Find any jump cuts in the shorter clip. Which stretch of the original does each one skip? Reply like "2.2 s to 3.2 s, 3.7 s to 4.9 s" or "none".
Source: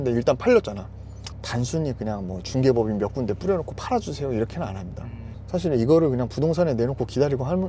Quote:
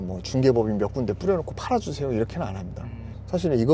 none